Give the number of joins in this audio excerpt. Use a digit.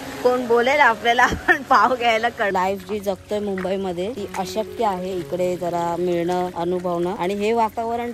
1